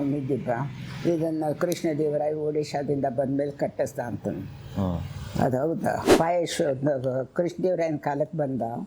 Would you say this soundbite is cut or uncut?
cut